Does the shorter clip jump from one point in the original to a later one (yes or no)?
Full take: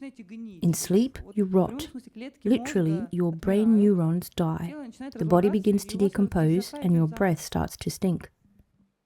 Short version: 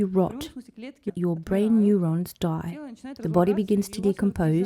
yes